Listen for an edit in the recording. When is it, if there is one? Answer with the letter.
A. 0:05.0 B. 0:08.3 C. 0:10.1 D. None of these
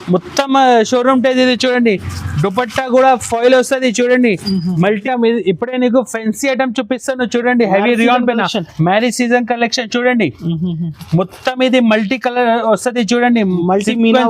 A